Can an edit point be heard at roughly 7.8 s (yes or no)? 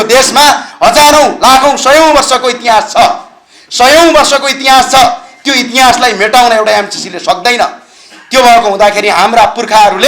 no